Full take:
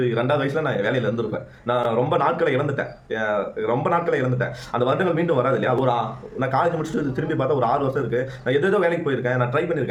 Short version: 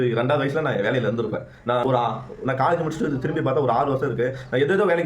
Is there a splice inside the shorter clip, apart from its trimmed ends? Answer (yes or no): yes